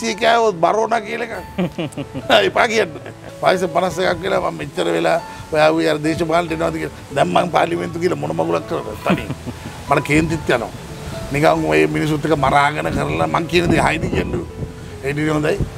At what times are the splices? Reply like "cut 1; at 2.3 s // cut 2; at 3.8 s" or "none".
cut 1; at 3.2 s